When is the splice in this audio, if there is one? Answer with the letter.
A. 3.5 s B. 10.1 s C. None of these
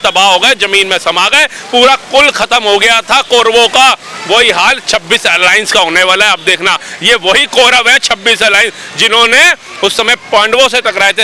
C